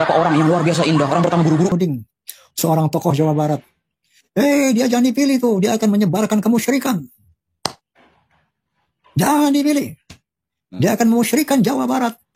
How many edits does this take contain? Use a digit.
1